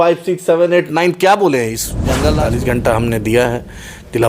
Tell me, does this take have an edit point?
yes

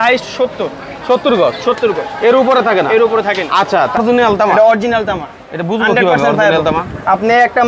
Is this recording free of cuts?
no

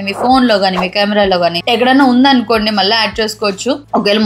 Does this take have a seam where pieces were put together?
no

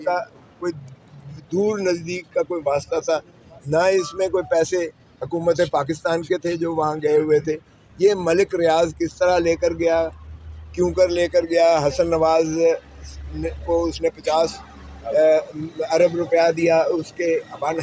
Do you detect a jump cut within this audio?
no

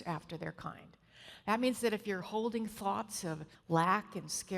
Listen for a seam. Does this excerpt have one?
yes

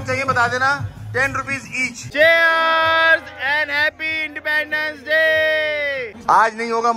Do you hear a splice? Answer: yes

